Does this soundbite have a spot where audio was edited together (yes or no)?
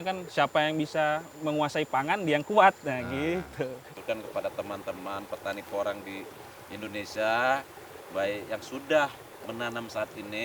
yes